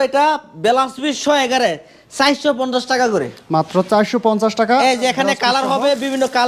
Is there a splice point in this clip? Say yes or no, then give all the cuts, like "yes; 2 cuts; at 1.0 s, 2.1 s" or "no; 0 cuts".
no; 0 cuts